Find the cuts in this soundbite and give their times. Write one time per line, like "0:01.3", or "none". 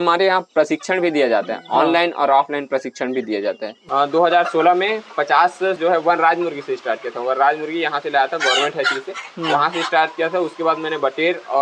0:03.7
0:05.8